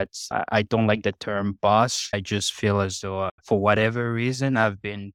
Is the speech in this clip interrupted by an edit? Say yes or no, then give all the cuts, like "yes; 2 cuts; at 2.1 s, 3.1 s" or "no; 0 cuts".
yes; 1 cut; at 3.4 s